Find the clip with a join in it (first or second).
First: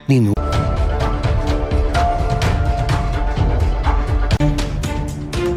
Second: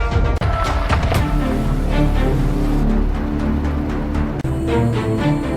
second